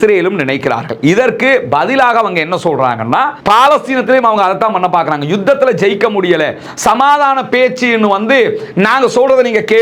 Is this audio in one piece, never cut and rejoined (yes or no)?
no